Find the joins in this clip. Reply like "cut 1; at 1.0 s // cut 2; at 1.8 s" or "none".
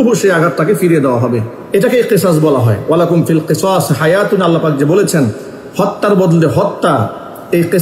cut 1; at 1.5 s